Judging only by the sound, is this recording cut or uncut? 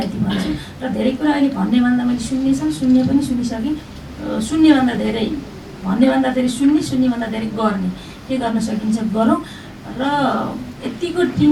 uncut